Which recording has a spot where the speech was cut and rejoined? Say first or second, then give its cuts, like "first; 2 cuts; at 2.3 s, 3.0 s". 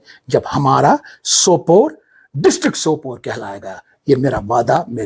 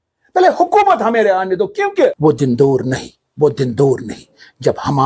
second; 1 cut; at 2.2 s